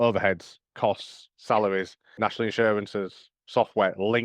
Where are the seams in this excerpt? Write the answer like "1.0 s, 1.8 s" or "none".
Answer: 2.0 s

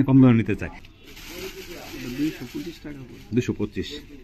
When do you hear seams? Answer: 0.9 s

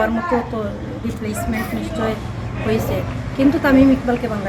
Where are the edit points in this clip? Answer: none

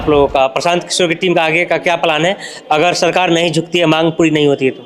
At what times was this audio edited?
none

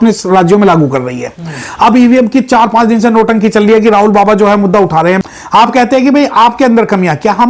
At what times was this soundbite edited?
5.2 s

